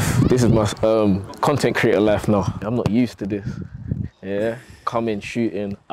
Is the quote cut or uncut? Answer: cut